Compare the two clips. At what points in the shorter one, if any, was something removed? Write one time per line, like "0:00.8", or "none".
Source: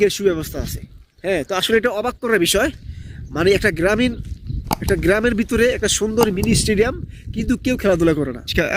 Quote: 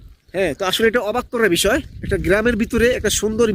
0:02.0